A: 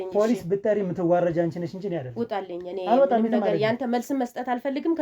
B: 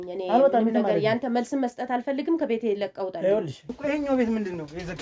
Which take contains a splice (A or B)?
B